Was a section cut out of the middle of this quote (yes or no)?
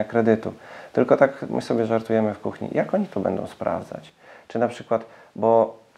no